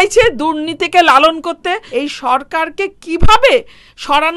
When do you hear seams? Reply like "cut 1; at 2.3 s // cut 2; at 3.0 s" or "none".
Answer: cut 1; at 1.8 s